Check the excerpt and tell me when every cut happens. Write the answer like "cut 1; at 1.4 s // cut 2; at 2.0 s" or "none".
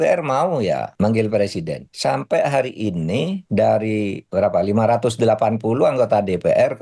cut 1; at 0.9 s // cut 2; at 1.8 s // cut 3; at 3.4 s // cut 4; at 4.2 s